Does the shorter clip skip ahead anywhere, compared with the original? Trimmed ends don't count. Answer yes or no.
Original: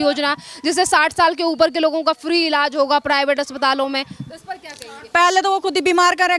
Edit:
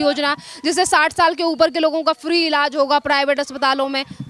no